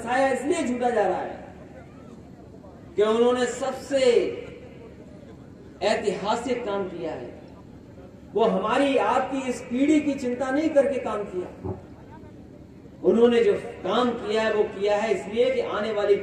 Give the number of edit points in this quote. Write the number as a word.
zero